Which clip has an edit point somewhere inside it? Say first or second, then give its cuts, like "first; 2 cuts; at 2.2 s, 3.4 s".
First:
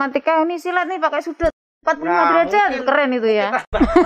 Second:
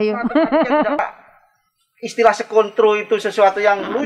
second; 1 cut; at 1.0 s